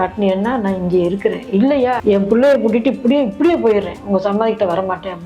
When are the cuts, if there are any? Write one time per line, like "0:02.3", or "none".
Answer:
0:02.0